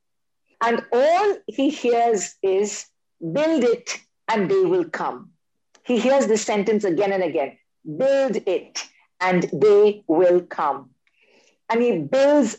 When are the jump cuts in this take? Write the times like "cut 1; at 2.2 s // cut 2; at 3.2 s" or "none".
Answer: none